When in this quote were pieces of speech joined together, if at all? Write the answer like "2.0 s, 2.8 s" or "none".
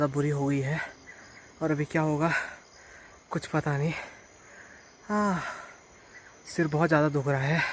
none